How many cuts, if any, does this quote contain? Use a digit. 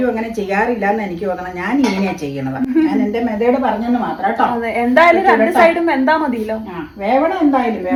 0